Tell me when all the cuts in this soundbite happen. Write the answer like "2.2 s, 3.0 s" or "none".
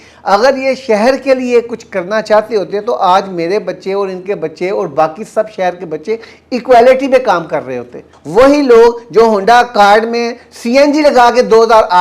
8.1 s